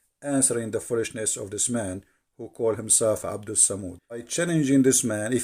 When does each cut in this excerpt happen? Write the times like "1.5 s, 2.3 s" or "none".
4.3 s